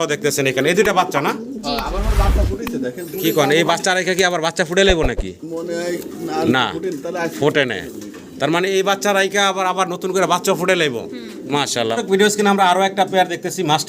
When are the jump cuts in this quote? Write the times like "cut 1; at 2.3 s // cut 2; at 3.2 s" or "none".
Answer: cut 1; at 11.9 s